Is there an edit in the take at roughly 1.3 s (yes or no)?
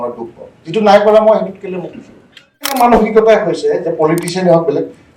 no